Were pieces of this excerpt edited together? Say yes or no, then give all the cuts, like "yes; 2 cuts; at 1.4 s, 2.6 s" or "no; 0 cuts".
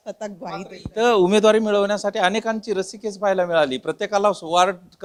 no; 0 cuts